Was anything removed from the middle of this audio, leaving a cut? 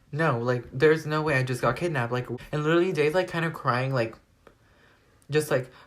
yes; 1 cut; at 2.3 s

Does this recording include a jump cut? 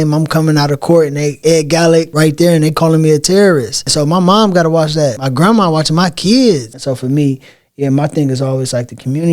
yes; 5 cuts; at 1.3 s, 2.1 s, 3.8 s, 5.2 s, 6.7 s

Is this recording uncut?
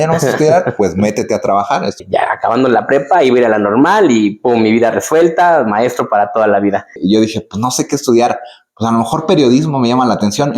no; 2 cuts; at 2.0 s, 7.0 s

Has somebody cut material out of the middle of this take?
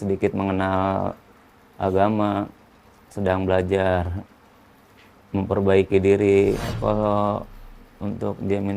yes; 1 cut; at 6.7 s

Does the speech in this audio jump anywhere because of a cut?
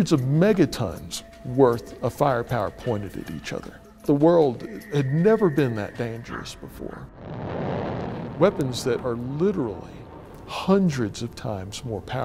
no; 0 cuts

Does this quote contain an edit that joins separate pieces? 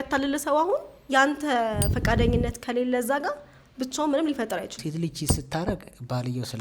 yes; 1 cut; at 4.8 s

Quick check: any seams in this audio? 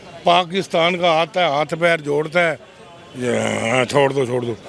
no; 0 cuts

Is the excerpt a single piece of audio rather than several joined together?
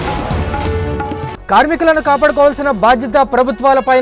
no; 1 cut; at 1.2 s

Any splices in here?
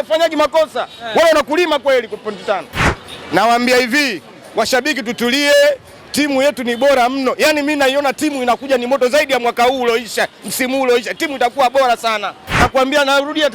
yes; 2 cuts; at 2.9 s, 12.6 s

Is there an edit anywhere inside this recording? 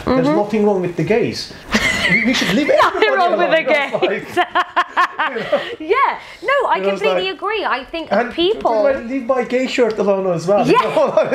no; 0 cuts

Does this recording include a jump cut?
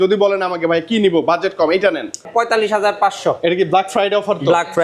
yes; 1 cut; at 2.3 s

